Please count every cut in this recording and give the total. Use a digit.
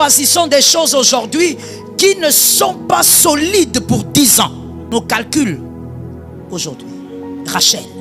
1